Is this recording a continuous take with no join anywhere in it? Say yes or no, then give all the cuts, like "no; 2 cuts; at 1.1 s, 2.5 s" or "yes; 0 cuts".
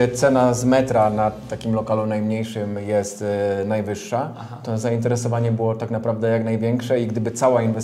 yes; 0 cuts